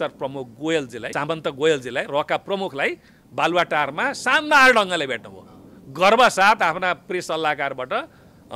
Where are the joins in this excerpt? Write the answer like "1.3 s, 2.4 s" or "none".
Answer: 1.1 s